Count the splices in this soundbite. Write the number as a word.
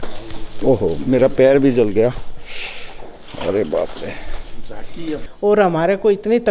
one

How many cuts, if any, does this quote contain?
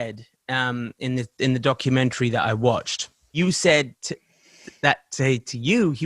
one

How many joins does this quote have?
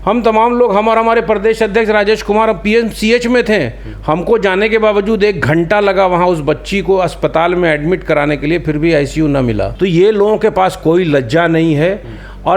one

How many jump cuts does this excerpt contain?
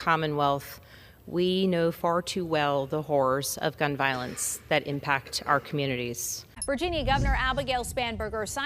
one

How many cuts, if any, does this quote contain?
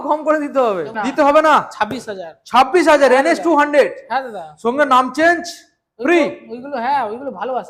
one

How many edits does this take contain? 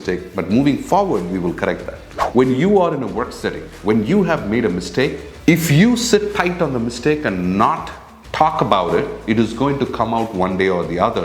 one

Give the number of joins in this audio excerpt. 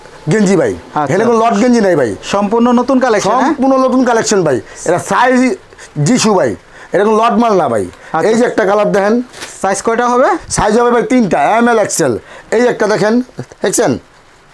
zero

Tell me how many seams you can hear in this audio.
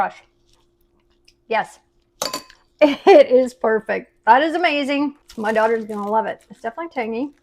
one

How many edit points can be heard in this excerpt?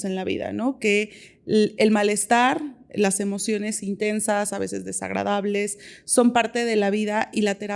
zero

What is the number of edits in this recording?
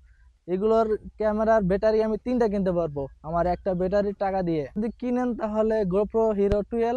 one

